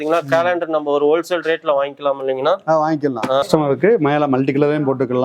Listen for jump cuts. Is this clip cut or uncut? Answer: cut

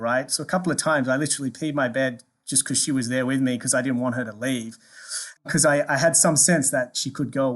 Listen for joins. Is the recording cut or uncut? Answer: cut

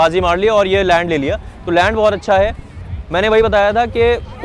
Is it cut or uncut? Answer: uncut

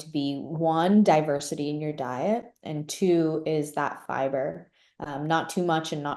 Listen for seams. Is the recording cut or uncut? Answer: uncut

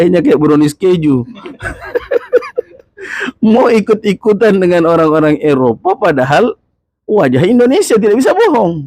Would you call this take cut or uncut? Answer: uncut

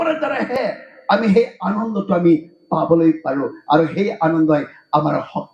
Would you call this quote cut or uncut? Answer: uncut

